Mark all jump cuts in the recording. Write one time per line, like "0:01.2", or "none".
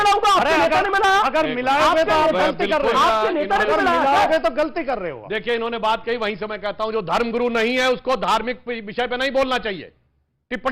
none